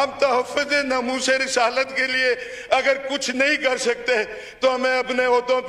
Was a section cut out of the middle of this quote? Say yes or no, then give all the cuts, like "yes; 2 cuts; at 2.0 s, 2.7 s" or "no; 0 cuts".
no; 0 cuts